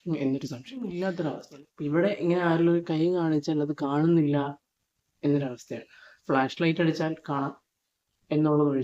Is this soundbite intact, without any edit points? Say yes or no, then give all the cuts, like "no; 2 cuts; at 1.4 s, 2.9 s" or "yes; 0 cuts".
no; 1 cut; at 0.9 s